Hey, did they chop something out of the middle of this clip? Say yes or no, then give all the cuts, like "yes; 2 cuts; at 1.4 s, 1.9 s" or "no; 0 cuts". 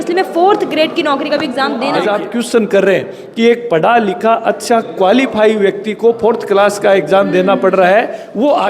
yes; 1 cut; at 2.0 s